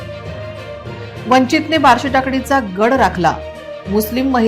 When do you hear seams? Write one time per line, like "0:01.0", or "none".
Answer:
0:01.2

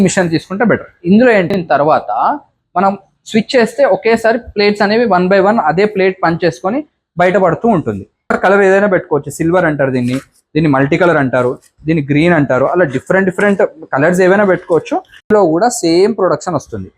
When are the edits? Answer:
0:01.5
0:08.3
0:15.3

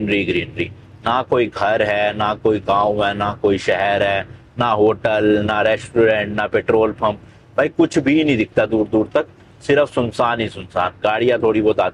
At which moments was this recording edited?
none

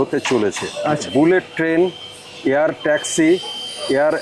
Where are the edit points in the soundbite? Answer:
0:01.1

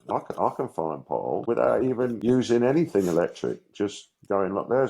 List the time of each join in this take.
0:01.4
0:02.2

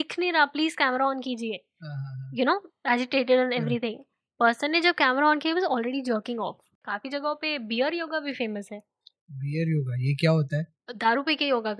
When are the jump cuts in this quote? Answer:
0:06.8

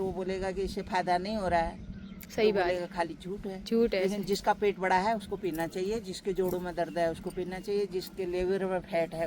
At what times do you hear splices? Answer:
none

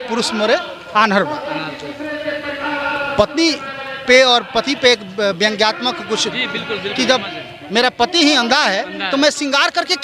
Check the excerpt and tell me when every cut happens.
none

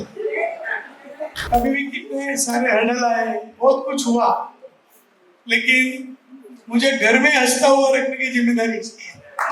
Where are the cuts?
0:01.4

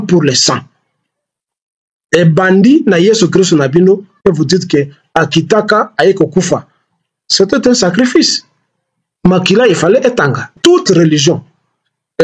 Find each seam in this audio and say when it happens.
0:10.5

